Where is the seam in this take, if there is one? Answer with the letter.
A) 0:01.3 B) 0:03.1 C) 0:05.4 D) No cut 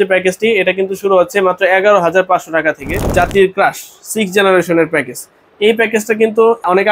B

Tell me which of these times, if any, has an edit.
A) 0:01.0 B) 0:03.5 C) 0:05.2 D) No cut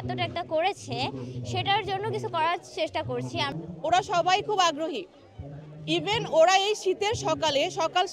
B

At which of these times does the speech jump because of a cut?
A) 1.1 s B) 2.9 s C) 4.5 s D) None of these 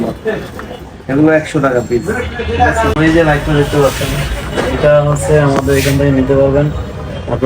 B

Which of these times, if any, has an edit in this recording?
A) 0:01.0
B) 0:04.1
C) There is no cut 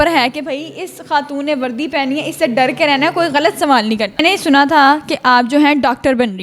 B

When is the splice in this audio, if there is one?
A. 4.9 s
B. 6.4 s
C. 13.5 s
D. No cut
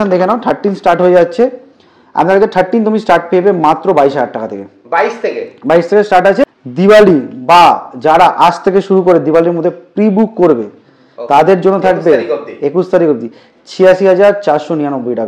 B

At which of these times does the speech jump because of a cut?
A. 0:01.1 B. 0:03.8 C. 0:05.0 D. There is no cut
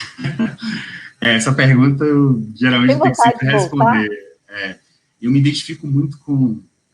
C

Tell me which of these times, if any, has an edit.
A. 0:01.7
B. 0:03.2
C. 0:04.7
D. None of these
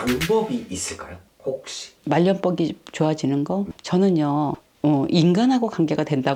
D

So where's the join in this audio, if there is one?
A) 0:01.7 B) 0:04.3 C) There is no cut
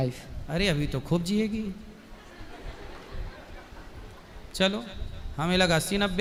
C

